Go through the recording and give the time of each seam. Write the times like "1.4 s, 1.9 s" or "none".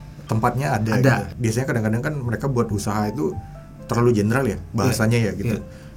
1.3 s